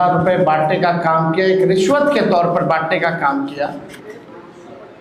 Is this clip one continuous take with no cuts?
yes; 0 cuts

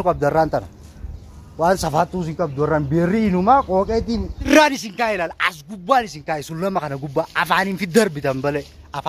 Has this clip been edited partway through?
yes; 1 cut; at 4.4 s

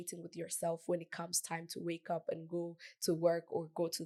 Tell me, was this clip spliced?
no; 0 cuts

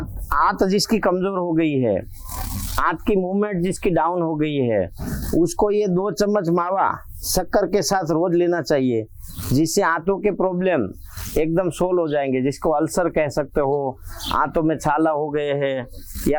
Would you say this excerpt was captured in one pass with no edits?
yes; 0 cuts

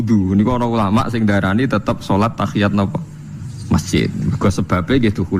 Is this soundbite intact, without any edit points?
yes; 0 cuts

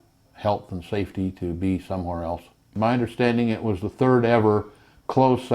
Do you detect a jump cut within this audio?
yes; 1 cut; at 2.7 s

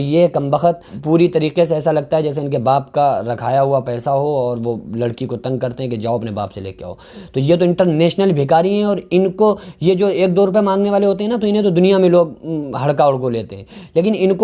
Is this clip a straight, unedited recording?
no; 1 cut; at 0.9 s

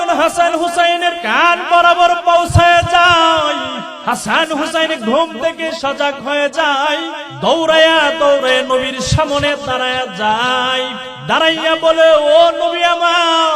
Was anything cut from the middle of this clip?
yes; 4 cuts; at 1.2 s, 3.9 s, 7.2 s, 11.1 s

